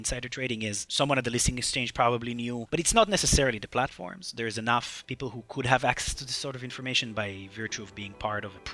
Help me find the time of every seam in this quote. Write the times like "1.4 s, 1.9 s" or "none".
none